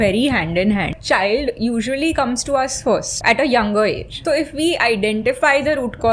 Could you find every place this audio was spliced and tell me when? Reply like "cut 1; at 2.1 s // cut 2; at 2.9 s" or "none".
cut 1; at 0.9 s // cut 2; at 3.1 s // cut 3; at 4.1 s